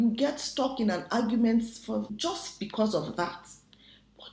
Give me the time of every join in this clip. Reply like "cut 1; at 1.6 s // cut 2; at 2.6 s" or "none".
cut 1; at 2.1 s

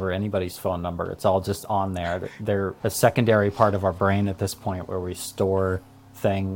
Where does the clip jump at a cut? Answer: none

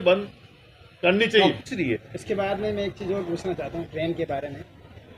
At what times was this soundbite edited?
cut 1; at 1.7 s

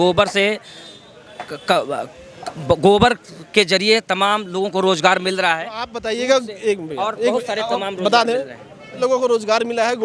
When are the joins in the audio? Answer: none

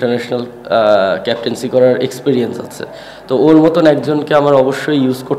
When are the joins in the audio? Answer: none

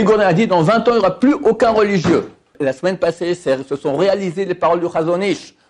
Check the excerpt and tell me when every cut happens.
cut 1; at 2.5 s

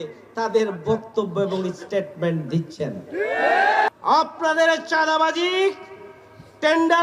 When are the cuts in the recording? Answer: cut 1; at 3.9 s

